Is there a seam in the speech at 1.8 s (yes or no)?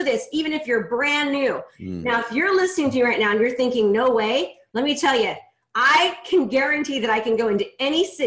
yes